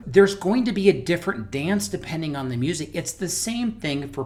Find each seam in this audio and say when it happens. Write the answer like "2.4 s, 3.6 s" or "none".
none

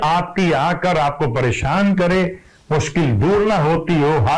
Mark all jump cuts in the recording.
none

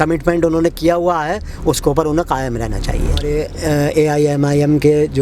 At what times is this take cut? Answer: 3.3 s

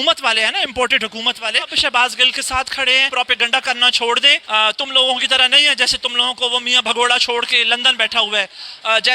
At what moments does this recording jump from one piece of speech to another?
1.7 s, 3.1 s, 4.4 s, 7.5 s

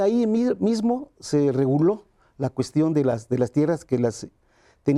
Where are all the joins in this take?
none

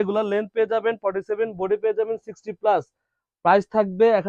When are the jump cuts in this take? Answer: none

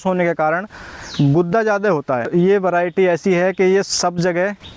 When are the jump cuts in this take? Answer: 2.3 s

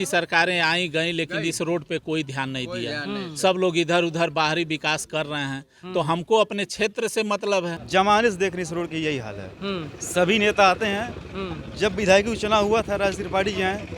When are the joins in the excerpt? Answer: 7.8 s

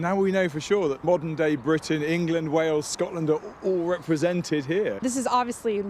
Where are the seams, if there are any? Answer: 1.0 s, 5.0 s

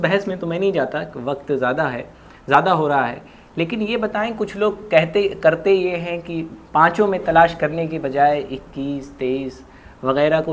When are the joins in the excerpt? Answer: none

